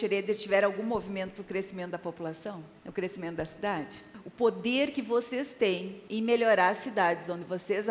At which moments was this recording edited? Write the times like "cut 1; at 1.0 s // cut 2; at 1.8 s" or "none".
none